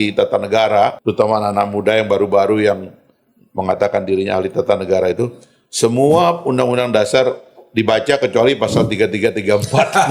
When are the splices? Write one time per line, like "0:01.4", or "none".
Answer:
0:01.0